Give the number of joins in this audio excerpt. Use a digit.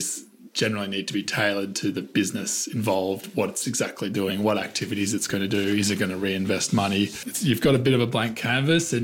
1